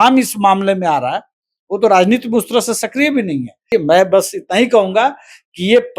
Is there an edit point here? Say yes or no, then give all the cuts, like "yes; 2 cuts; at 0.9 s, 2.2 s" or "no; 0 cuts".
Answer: yes; 1 cut; at 3.7 s